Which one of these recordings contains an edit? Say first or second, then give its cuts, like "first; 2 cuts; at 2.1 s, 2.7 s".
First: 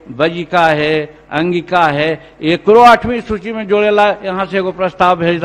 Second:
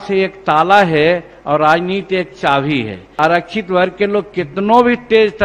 second; 1 cut; at 3.1 s